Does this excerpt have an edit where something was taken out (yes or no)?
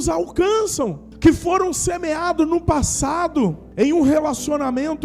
yes